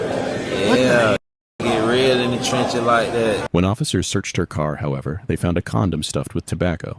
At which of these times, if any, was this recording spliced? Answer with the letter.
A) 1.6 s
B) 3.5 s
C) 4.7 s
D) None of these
B